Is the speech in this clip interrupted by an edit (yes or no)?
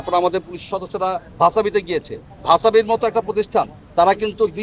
no